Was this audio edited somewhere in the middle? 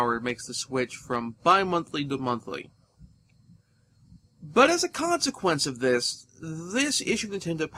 no; 0 cuts

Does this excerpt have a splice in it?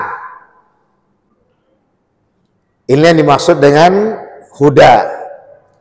no; 0 cuts

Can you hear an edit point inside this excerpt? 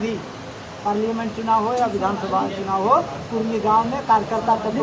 no; 0 cuts

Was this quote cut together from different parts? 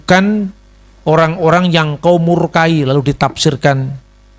no; 0 cuts

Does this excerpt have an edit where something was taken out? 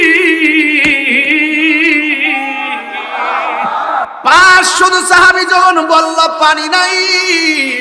yes; 1 cut; at 4.1 s

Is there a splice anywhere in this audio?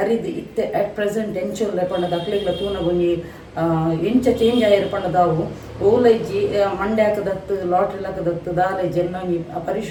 no; 0 cuts

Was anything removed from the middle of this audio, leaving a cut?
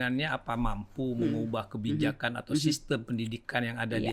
no; 0 cuts

